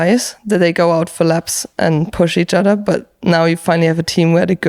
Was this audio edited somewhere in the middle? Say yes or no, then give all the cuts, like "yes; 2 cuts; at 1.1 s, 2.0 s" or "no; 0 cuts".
no; 0 cuts